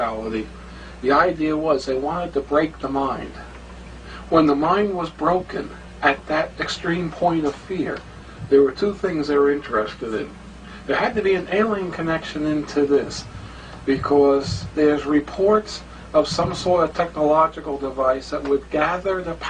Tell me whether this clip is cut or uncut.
cut